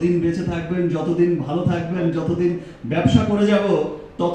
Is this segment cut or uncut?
uncut